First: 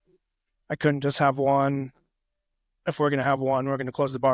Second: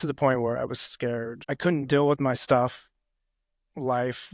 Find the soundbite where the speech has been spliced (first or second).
second